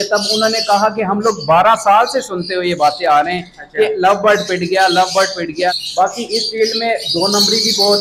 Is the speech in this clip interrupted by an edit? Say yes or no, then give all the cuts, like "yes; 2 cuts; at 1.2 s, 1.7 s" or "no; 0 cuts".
yes; 1 cut; at 5.7 s